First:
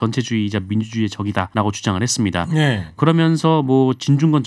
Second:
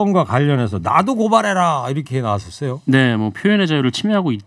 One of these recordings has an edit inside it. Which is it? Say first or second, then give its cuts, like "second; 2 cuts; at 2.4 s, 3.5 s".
first; 2 cuts; at 1.5 s, 3.0 s